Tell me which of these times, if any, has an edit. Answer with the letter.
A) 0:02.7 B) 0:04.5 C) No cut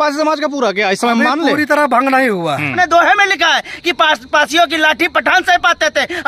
A